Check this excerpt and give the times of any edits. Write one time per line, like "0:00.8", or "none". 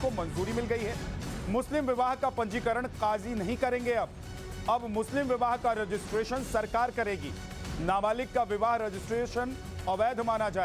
0:02.9